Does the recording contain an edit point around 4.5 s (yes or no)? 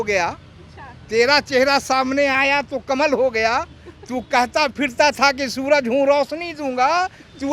no